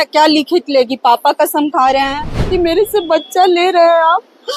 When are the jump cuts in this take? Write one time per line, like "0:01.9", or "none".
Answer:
0:02.4